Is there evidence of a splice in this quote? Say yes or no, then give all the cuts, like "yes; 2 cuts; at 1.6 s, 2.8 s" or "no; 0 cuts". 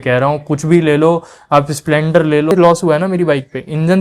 yes; 1 cut; at 2.5 s